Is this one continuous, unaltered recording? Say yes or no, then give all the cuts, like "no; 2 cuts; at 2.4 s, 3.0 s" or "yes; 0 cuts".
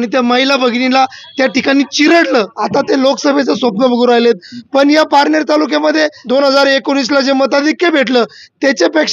no; 2 cuts; at 2.6 s, 6.2 s